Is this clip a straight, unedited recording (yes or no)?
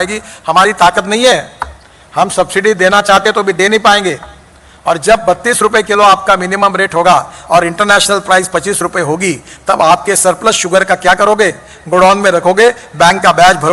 yes